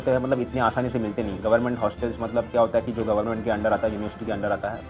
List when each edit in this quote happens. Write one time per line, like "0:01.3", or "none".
none